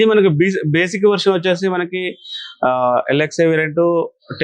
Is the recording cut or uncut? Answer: uncut